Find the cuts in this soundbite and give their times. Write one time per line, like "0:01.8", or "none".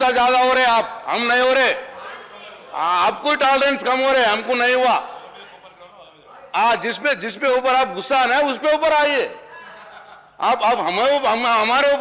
none